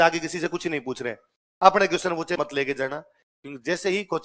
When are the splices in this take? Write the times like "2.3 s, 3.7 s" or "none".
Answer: 2.4 s